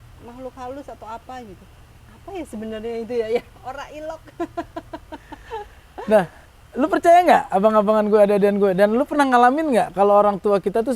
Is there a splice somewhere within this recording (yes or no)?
no